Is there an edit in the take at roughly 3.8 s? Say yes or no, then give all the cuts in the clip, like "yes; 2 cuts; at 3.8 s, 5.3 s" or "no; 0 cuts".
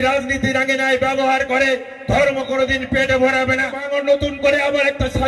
yes; 1 cut; at 3.8 s